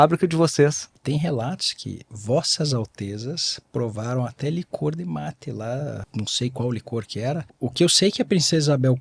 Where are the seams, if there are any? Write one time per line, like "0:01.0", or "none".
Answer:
0:01.0
0:06.0
0:07.5